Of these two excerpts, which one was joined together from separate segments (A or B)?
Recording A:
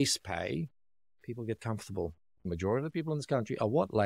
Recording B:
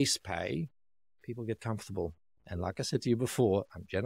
A